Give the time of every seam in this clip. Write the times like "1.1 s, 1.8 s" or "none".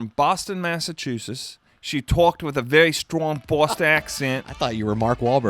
4.5 s